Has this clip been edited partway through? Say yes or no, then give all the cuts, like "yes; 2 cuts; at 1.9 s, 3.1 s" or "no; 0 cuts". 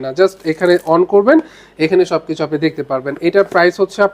no; 0 cuts